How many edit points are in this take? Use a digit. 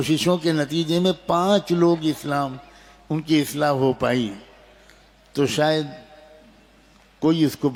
0